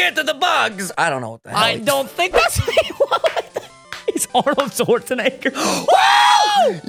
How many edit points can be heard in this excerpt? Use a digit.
0